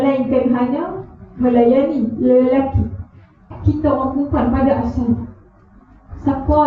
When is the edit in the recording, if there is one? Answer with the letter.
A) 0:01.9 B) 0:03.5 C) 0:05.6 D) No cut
B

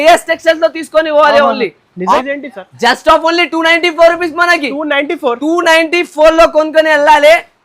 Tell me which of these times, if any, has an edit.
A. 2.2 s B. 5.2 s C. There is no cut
A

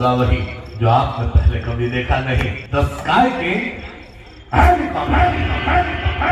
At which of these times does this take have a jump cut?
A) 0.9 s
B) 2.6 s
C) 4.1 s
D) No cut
B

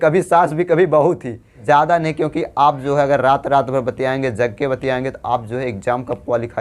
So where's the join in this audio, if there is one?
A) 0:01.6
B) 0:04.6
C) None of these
A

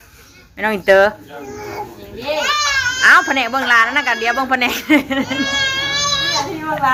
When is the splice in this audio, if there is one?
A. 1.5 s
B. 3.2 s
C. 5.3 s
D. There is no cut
D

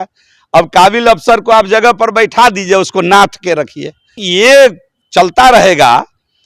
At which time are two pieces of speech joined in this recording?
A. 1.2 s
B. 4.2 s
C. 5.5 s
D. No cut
B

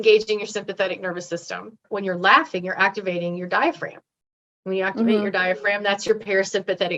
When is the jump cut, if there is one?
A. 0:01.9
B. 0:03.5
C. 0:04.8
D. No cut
A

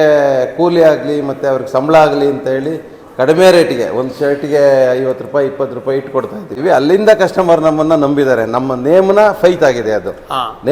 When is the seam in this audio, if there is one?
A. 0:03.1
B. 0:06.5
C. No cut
B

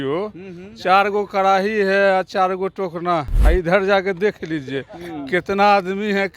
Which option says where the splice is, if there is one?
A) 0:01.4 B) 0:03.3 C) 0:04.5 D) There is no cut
B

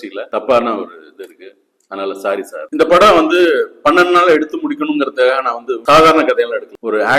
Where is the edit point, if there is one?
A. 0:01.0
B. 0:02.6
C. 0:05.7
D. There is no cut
B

